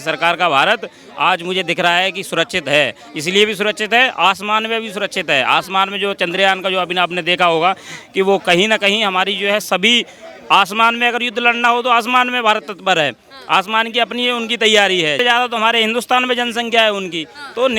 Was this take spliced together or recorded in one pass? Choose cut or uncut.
uncut